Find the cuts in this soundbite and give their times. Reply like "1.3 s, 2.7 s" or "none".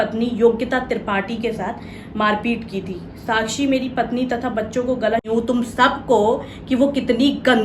5.2 s